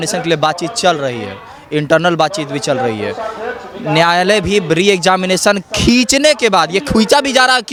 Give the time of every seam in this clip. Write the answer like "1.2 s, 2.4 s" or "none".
none